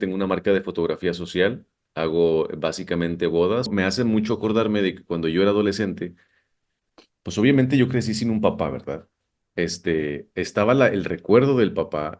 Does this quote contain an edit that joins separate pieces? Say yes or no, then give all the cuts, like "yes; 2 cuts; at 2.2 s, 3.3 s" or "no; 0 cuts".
yes; 1 cut; at 3.7 s